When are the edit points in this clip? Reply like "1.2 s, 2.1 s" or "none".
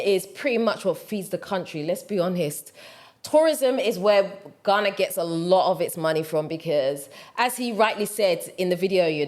none